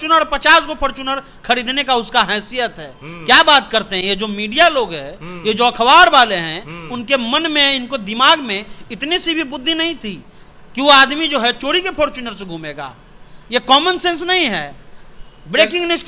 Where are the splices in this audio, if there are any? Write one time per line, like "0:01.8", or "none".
none